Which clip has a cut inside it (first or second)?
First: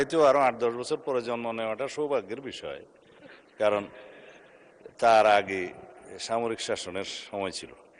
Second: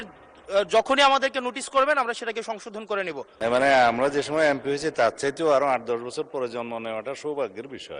second